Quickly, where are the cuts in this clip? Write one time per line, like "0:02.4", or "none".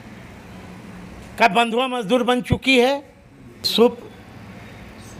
0:03.7